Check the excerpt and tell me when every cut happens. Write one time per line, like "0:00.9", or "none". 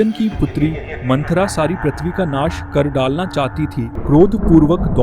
0:03.9